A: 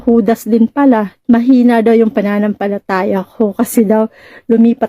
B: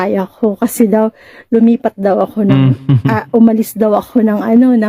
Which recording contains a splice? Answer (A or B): A